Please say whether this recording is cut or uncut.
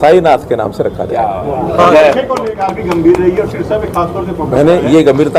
cut